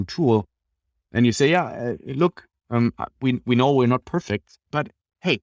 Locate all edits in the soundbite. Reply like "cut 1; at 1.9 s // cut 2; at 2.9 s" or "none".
none